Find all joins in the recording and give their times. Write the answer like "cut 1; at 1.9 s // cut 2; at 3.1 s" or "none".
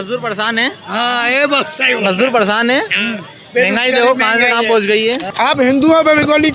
cut 1; at 5.2 s